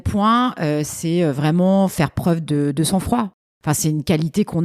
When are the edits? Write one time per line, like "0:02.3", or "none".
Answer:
0:03.5